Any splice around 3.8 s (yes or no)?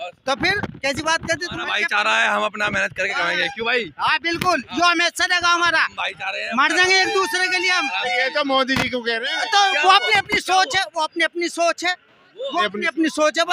no